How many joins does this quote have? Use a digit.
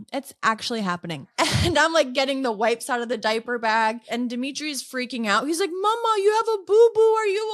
2